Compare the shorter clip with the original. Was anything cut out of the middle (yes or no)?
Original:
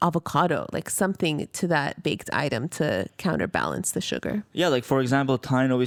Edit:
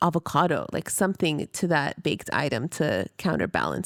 no